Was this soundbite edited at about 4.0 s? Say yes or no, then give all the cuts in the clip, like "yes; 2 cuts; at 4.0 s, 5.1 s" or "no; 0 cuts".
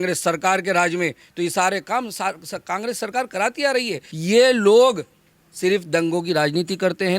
yes; 1 cut; at 4.0 s